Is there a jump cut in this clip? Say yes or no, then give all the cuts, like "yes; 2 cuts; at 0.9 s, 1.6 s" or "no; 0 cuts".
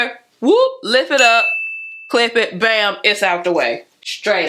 no; 0 cuts